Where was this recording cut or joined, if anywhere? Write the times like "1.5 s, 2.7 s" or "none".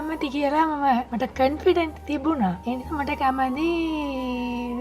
1.1 s, 2.6 s